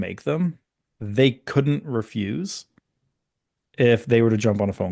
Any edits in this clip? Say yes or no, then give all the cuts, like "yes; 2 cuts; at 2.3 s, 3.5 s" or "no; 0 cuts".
no; 0 cuts